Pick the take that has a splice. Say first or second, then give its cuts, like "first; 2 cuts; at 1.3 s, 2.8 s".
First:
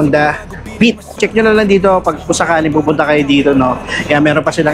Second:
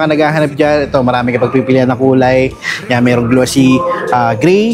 first; 1 cut; at 1.1 s